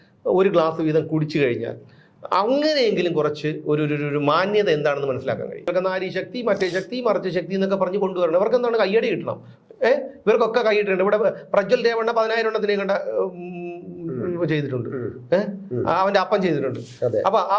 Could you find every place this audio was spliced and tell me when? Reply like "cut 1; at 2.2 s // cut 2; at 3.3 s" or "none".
cut 1; at 5.7 s